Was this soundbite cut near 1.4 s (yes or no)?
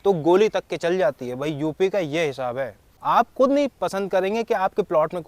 no